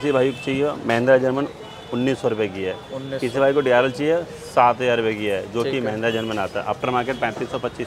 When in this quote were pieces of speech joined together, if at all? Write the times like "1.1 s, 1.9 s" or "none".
none